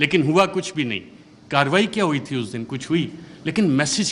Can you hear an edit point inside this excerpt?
no; 0 cuts

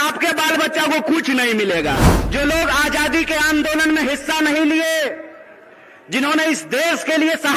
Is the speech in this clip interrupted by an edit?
yes; 1 cut; at 2.1 s

